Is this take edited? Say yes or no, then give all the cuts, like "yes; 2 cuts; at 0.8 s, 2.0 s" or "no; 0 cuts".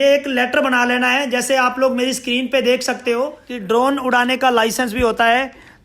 yes; 1 cut; at 3.5 s